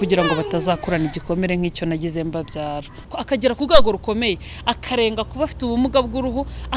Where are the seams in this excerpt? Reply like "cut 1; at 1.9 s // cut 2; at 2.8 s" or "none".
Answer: cut 1; at 3.1 s